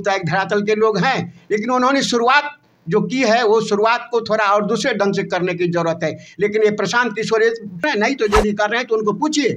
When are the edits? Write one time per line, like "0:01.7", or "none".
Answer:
0:07.8